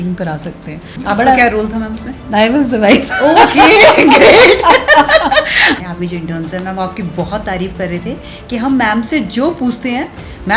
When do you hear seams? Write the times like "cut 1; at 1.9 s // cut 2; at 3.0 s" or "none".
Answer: cut 1; at 1.0 s // cut 2; at 5.8 s